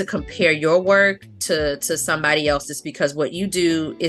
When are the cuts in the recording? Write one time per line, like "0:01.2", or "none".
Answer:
none